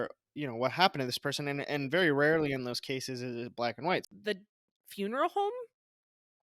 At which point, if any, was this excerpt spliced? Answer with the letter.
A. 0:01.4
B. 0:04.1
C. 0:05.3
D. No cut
B